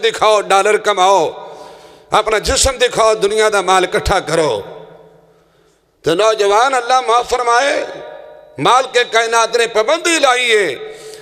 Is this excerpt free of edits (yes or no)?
yes